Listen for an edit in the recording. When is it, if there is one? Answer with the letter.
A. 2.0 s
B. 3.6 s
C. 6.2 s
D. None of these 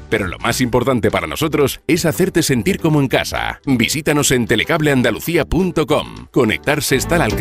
C